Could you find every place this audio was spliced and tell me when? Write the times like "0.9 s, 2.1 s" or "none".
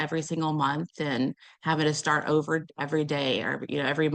2.7 s